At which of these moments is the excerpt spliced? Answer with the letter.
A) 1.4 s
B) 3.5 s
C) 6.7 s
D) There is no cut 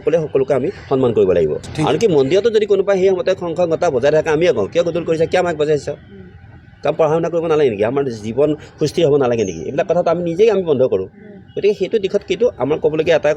D